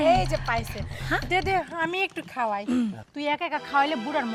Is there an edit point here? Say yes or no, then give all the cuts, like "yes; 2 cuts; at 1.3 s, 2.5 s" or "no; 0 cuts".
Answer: no; 0 cuts